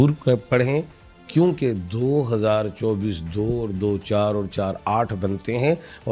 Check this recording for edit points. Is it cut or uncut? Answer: uncut